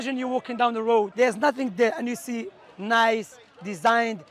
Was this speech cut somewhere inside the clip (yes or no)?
yes